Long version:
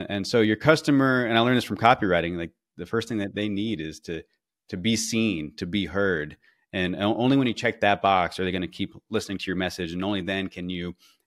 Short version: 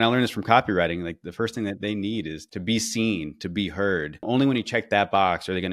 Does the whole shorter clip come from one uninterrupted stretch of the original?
no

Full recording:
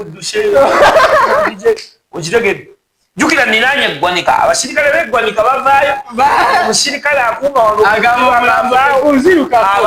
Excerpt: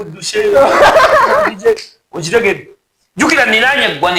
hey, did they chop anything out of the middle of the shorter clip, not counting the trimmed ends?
no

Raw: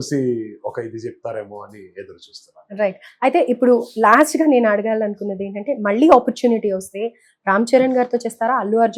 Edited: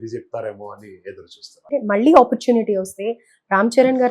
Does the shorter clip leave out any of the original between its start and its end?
yes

